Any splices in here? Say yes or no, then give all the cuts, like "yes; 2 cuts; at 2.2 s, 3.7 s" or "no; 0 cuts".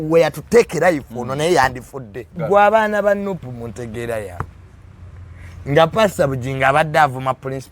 yes; 1 cut; at 2.4 s